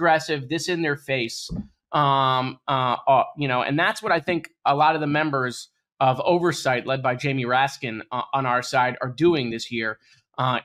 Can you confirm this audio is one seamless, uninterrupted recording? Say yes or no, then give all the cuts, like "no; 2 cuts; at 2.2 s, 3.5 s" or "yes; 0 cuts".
yes; 0 cuts